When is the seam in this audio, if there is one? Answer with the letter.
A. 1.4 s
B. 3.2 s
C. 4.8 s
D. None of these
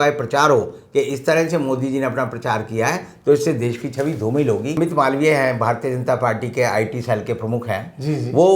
C